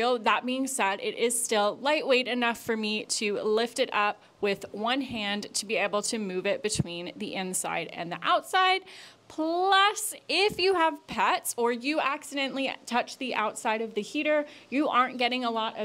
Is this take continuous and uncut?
yes; 0 cuts

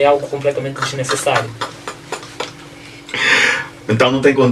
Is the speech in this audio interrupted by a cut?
no; 0 cuts

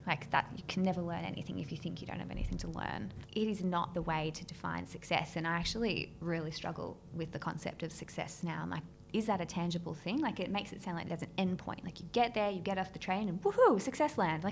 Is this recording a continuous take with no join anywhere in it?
no; 2 cuts; at 3.2 s, 8.9 s

